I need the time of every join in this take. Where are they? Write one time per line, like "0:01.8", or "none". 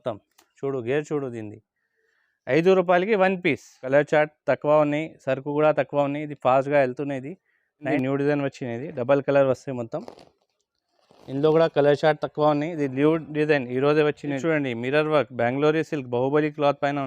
0:03.8
0:07.9
0:14.4